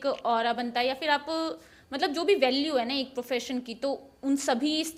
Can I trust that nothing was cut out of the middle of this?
yes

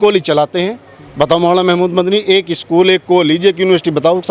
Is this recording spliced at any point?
no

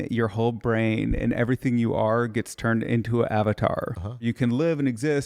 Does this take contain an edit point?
yes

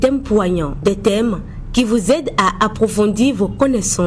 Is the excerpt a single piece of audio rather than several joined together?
yes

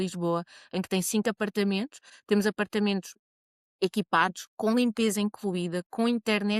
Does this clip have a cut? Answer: no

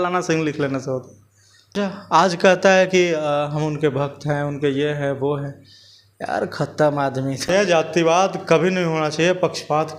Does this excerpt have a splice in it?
yes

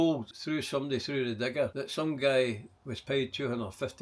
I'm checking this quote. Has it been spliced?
yes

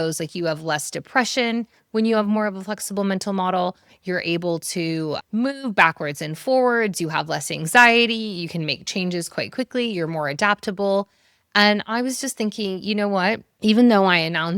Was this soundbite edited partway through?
no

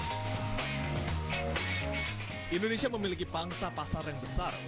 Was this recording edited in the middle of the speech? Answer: yes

